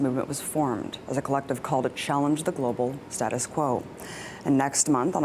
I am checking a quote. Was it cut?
no; 0 cuts

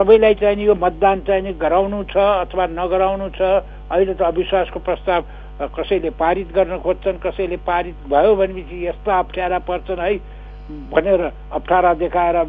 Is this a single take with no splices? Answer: yes; 0 cuts

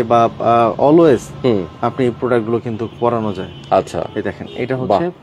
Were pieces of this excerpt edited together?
no; 0 cuts

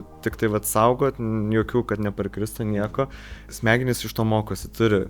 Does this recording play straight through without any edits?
no; 1 cut; at 3.5 s

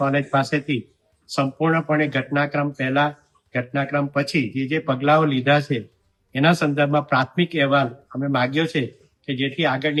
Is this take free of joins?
yes; 0 cuts

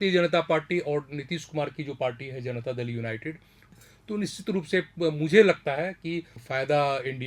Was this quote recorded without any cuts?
no; 2 cuts; at 3.6 s, 6.4 s

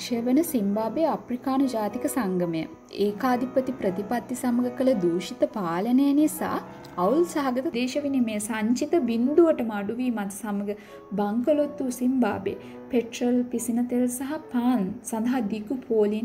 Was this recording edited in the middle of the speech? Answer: yes; 1 cut; at 7.7 s

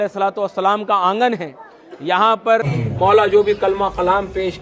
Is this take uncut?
no; 1 cut; at 2.7 s

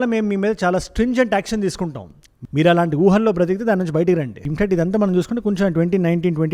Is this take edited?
no; 0 cuts

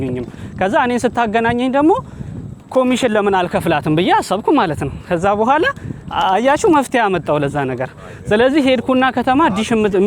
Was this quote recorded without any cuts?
yes; 0 cuts

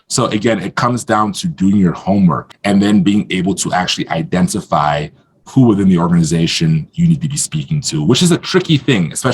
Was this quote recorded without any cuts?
no; 1 cut; at 2.5 s

